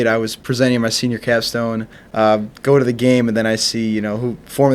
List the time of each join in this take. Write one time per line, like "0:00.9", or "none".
0:02.0